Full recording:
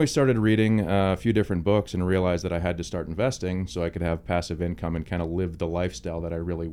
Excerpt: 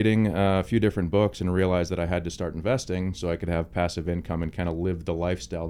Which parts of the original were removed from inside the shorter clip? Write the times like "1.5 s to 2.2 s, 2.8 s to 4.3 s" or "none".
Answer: none